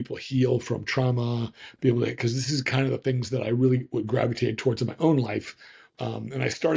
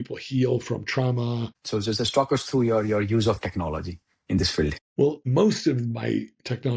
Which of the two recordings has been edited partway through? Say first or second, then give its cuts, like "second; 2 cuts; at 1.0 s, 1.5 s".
second; 2 cuts; at 1.5 s, 4.9 s